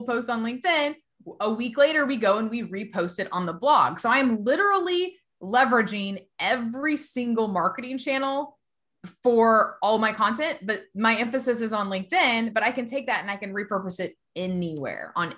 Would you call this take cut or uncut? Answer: uncut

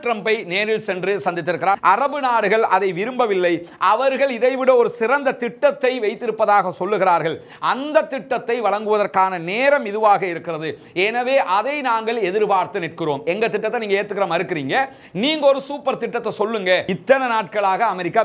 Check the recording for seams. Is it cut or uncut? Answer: cut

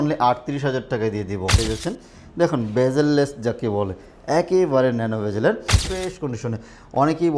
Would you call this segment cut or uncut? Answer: cut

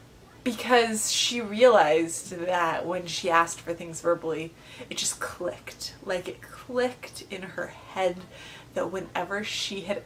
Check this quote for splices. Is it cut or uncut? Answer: uncut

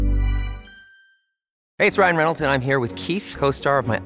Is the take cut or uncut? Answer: cut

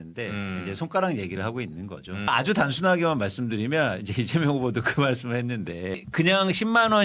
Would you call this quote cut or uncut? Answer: cut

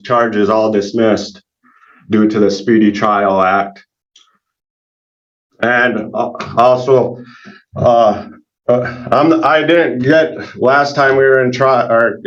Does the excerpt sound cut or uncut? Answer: uncut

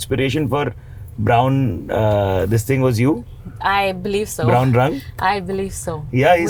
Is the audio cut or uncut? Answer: uncut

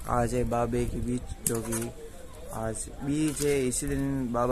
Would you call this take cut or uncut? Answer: uncut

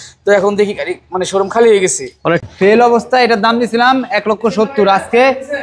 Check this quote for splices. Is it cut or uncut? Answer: cut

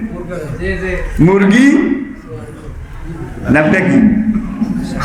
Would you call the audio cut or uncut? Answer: uncut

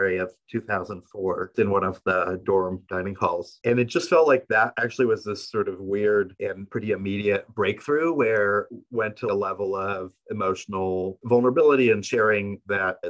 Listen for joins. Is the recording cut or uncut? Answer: cut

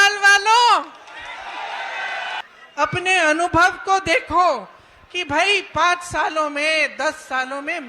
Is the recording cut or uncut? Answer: uncut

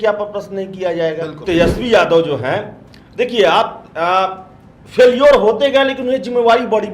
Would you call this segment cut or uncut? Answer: cut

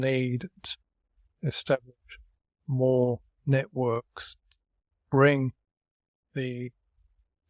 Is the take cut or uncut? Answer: uncut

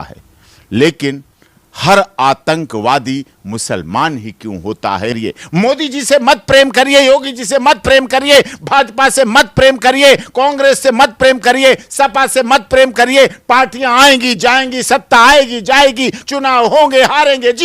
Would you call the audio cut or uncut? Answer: cut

